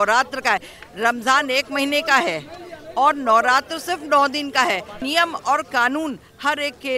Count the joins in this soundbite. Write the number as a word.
one